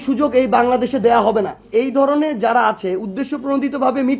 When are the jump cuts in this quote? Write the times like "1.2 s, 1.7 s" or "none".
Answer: 1.5 s